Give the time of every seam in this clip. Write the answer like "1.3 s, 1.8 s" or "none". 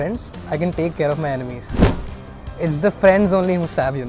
none